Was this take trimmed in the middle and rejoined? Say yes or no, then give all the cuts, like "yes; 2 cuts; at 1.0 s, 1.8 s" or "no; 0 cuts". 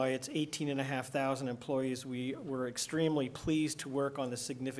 no; 0 cuts